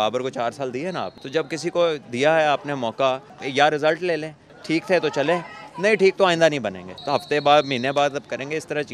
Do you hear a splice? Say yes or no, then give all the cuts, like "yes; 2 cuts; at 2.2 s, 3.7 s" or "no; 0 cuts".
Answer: yes; 4 cuts; at 1.2 s, 3.4 s, 4.5 s, 6.9 s